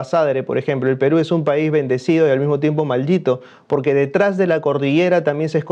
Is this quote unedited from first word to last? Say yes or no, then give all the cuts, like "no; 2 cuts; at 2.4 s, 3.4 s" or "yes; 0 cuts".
yes; 0 cuts